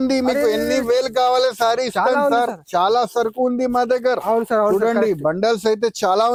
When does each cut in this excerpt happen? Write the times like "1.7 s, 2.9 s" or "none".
none